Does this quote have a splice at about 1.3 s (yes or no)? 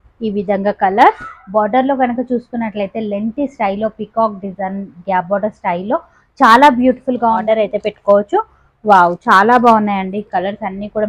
yes